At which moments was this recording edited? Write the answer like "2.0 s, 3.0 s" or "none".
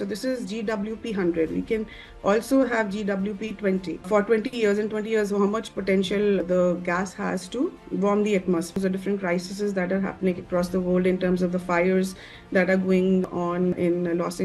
8.8 s